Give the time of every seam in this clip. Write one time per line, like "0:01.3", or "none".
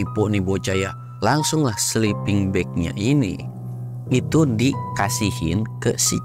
0:01.0